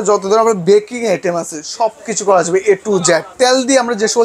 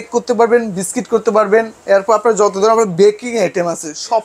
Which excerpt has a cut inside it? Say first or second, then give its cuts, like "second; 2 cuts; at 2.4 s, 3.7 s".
first; 1 cut; at 3.3 s